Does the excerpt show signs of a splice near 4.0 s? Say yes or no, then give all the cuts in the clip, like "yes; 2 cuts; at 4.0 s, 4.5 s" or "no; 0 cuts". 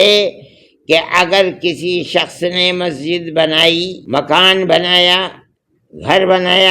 yes; 1 cut; at 4.0 s